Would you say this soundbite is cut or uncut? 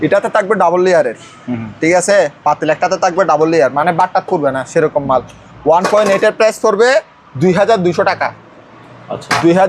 uncut